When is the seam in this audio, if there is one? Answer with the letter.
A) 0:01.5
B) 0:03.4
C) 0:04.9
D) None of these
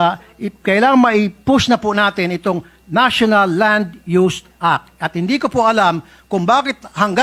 D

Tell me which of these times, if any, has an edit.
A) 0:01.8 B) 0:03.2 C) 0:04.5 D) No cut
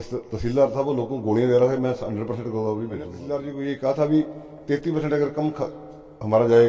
B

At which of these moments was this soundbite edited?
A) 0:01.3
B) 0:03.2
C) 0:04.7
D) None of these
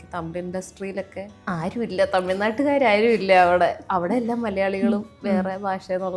A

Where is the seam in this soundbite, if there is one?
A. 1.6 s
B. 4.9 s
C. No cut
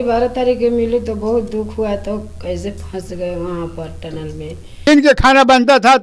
B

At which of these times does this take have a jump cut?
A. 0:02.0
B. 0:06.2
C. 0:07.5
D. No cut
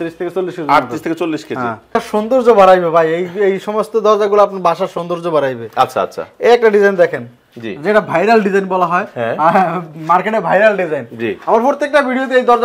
A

